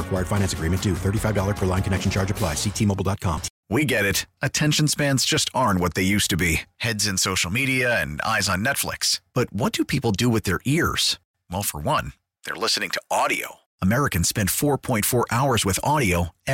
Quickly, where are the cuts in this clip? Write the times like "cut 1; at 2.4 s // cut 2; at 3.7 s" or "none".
cut 1; at 3.5 s